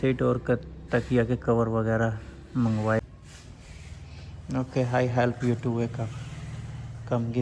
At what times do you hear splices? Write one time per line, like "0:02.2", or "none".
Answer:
0:03.0